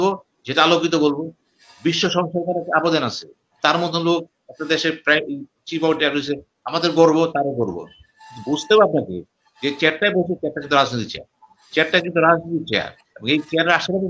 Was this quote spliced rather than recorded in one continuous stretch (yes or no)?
no